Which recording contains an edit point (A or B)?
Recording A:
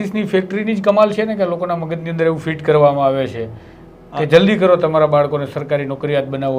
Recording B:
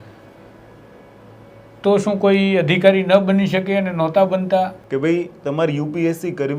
B